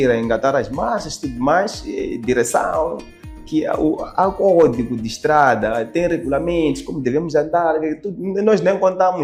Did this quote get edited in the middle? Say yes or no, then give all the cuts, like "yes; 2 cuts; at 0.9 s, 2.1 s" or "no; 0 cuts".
no; 0 cuts